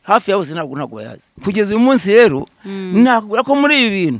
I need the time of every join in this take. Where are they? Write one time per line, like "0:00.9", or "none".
0:01.3